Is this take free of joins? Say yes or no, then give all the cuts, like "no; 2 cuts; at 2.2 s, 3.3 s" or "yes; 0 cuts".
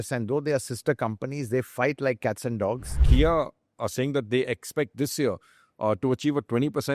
no; 1 cut; at 3.0 s